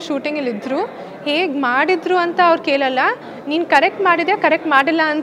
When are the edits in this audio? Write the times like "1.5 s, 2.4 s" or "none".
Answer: none

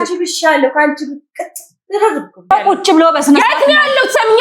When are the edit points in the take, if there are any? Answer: 2.5 s

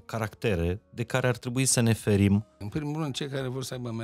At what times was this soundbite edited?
2.6 s

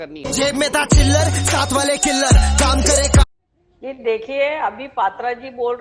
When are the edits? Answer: none

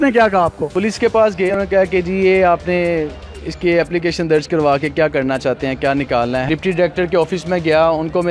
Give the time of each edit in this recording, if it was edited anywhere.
1.5 s, 6.4 s

